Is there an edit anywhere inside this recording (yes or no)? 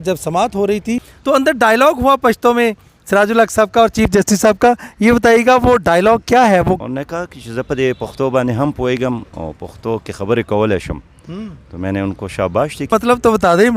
yes